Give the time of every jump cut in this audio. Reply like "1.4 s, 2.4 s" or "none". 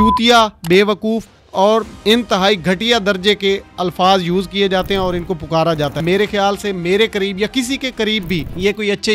6.0 s